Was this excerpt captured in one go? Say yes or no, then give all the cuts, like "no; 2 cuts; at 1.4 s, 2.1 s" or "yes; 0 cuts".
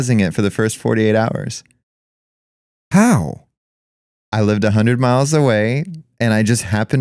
yes; 0 cuts